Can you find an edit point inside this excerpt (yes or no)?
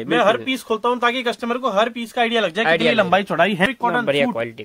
yes